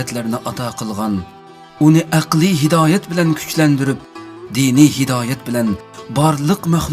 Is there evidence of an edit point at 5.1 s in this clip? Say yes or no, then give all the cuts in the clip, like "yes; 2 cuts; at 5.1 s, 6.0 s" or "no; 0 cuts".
yes; 1 cut; at 5.1 s